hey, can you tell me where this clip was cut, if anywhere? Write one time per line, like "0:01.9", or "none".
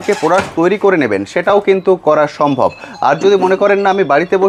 none